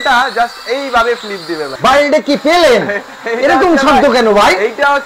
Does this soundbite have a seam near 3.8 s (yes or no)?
no